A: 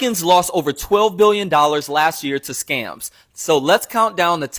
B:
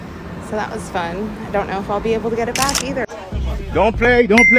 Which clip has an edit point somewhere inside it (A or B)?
B